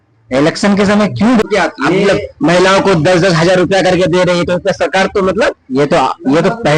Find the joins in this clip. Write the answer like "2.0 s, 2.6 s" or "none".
1.4 s